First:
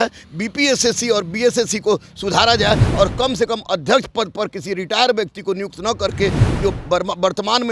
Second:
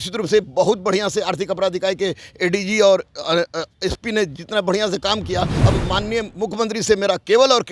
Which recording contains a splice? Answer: second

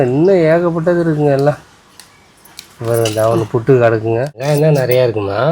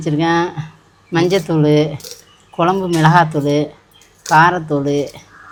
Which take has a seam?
first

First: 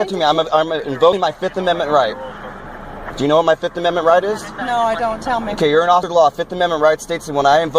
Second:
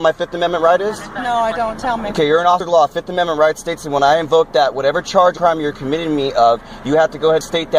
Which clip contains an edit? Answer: first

